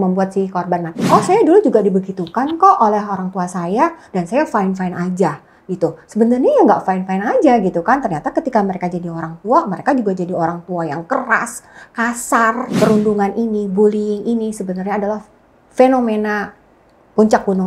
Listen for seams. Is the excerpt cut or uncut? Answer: cut